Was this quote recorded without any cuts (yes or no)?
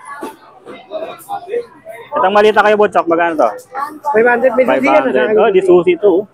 yes